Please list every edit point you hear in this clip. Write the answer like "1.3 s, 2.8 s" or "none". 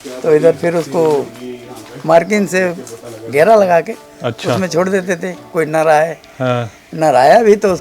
none